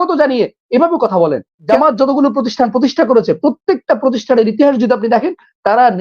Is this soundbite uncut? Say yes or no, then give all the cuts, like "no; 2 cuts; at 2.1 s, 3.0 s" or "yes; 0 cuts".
no; 1 cut; at 1.5 s